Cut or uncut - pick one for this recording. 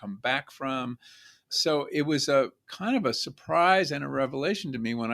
cut